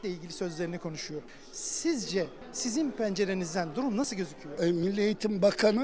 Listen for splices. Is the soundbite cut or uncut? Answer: cut